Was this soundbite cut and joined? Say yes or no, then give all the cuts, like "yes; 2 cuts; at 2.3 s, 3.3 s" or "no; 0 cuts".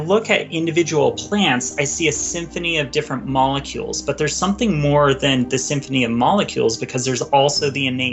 no; 0 cuts